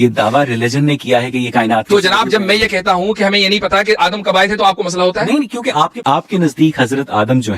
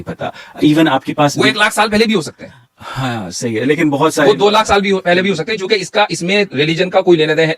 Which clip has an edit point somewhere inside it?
first; 1 cut; at 6.0 s

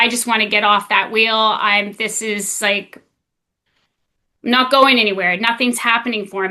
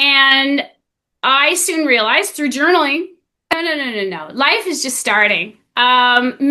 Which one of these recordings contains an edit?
second; 1 cut; at 3.5 s

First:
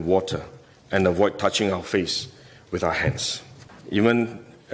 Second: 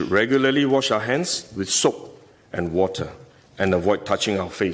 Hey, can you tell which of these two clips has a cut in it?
first; 1 cut; at 3.7 s

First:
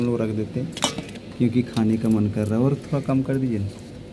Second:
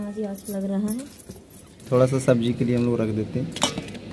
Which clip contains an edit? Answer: second; 1 cut; at 1.8 s

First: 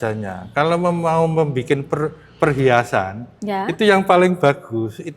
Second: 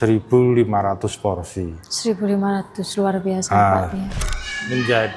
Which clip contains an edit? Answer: second; 1 cut; at 4.1 s

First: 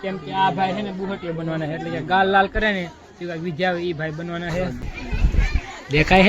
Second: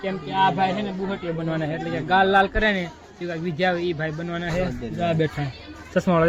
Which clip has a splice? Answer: first; 1 cut; at 4.8 s

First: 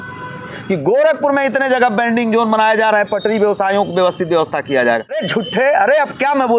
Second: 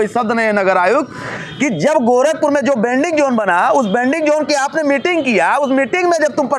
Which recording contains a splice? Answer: first; 1 cut; at 5.2 s

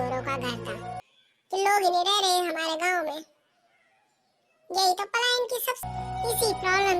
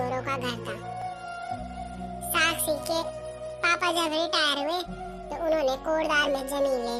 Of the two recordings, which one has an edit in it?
first; 2 cuts; at 1.0 s, 5.8 s

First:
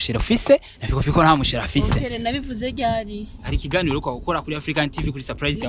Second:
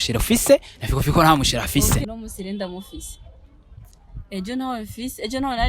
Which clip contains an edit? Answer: second; 1 cut; at 2.0 s

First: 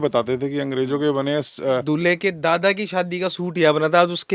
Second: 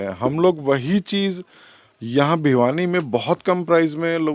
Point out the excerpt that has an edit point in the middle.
first; 1 cut; at 1.8 s

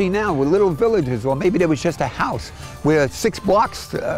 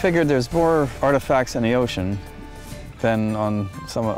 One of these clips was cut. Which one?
second; 1 cut; at 0.9 s

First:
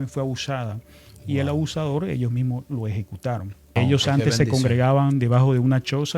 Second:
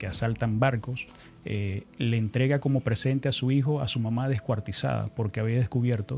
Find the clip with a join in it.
first; 1 cut; at 3.7 s

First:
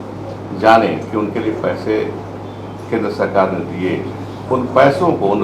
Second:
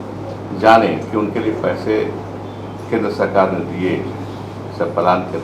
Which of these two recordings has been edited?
first; 1 cut; at 4.3 s

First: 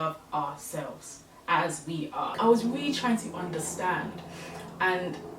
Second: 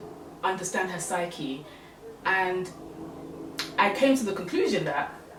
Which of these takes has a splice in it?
first; 1 cut; at 2.3 s

